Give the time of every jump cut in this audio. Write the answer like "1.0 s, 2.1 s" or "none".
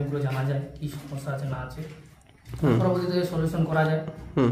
none